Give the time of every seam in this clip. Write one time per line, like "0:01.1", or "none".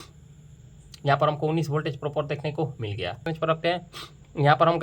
0:03.3